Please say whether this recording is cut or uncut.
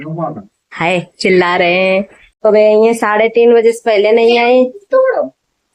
cut